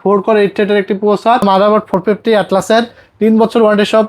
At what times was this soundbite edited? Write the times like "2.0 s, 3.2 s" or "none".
1.4 s